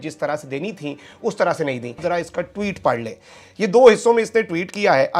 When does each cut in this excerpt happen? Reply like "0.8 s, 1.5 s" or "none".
none